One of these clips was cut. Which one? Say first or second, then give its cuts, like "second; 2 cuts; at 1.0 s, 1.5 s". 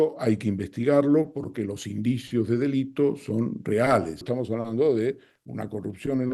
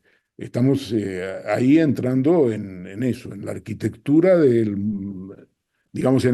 first; 1 cut; at 4.3 s